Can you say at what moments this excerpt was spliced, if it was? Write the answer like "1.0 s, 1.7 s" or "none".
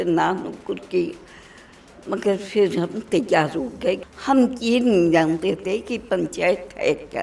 4.0 s